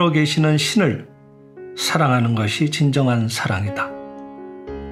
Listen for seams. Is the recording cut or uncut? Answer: cut